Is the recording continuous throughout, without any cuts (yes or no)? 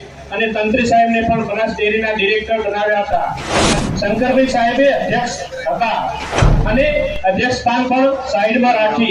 no